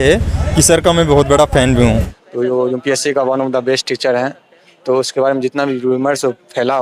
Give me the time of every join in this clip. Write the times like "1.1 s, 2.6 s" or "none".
2.1 s